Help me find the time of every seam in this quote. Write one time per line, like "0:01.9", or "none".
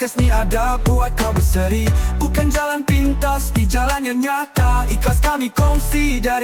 none